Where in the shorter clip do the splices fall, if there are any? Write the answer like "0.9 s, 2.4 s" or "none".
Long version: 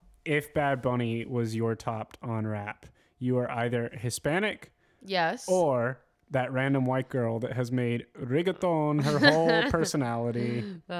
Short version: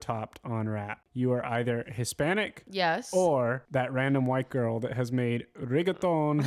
1.0 s, 2.6 s, 3.6 s